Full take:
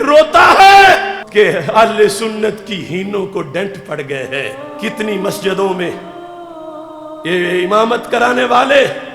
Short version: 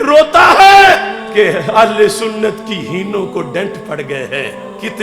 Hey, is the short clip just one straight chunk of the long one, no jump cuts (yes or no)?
yes